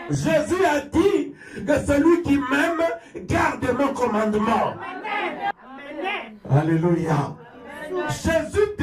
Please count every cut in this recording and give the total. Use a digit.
1